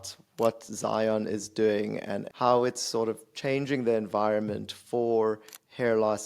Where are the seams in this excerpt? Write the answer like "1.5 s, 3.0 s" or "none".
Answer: 2.3 s